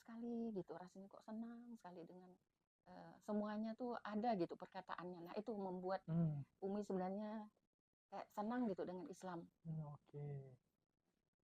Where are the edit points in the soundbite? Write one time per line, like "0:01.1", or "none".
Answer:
none